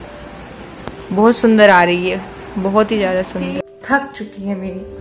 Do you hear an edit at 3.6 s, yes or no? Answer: yes